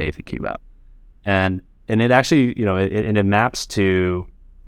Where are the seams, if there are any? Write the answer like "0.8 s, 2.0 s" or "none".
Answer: none